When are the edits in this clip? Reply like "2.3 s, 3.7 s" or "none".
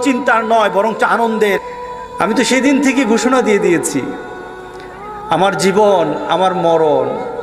1.6 s